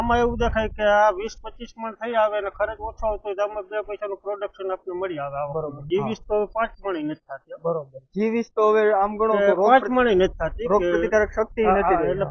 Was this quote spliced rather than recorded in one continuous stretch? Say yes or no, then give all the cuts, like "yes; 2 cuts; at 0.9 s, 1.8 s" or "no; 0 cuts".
yes; 1 cut; at 5.8 s